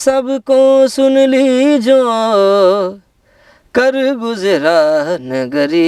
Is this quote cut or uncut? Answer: uncut